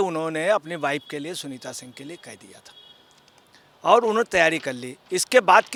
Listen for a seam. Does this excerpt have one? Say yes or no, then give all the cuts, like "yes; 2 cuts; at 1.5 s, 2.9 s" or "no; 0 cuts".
no; 0 cuts